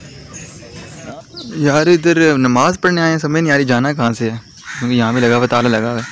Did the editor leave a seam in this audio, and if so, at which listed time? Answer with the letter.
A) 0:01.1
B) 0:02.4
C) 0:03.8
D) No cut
A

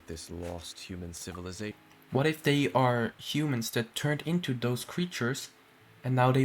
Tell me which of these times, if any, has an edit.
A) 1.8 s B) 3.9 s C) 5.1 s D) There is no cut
A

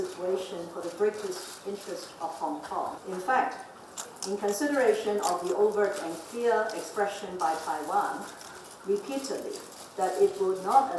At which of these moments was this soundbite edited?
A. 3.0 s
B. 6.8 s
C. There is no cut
A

